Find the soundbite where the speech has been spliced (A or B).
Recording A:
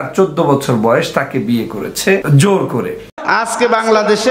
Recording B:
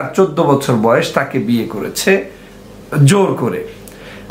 A